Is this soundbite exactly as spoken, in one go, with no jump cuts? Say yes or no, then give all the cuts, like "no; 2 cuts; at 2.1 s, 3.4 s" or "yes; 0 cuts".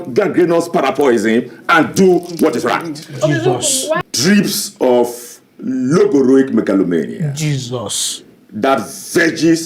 no; 1 cut; at 4.0 s